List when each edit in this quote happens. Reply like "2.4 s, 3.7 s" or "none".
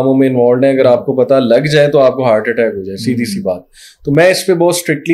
none